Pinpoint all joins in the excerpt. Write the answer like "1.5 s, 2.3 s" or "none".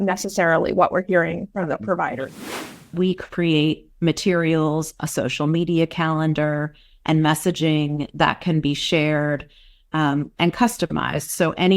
2.9 s

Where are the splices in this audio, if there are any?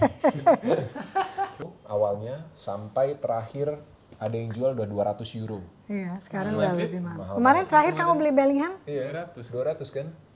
1.6 s

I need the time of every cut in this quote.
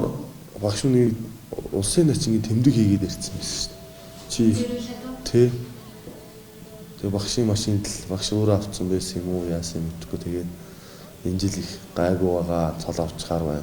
1.1 s

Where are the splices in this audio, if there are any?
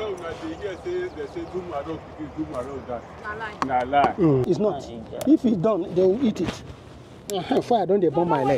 4.4 s

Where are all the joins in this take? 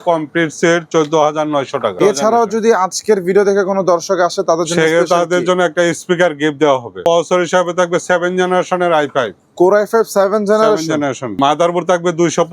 2.0 s, 7.0 s, 11.4 s

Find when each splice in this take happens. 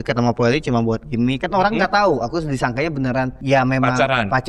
3.4 s

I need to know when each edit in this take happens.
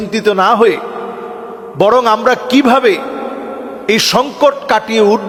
none

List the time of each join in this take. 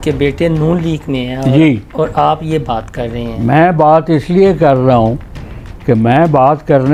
none

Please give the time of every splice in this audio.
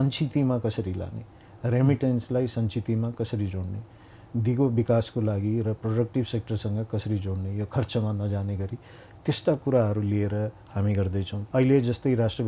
11.4 s

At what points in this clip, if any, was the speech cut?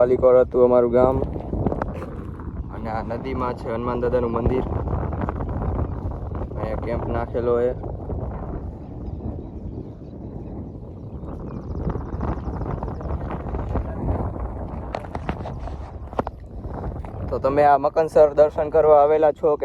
none

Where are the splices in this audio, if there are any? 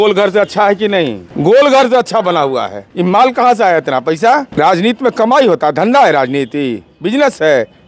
1.2 s, 2.8 s, 4.5 s

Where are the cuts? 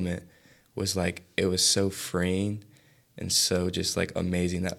none

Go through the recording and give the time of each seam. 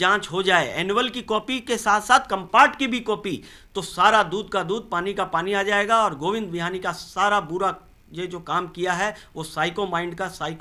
none

